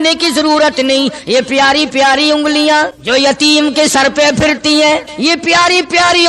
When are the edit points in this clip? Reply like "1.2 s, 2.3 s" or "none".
3.0 s, 5.1 s